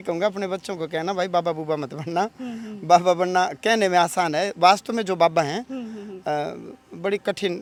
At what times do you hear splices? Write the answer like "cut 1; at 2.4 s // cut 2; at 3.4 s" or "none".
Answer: none

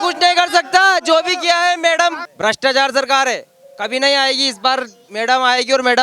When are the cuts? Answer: cut 1; at 2.3 s

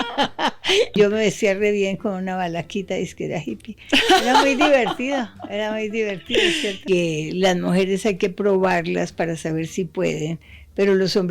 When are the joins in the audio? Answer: cut 1; at 0.9 s // cut 2; at 6.8 s

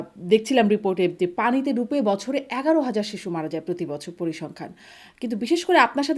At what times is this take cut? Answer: none

